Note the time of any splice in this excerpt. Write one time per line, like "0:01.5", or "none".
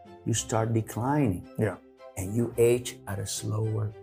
none